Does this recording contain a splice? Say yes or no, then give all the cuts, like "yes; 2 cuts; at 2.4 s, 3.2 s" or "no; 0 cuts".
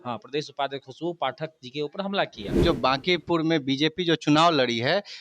yes; 1 cut; at 2.6 s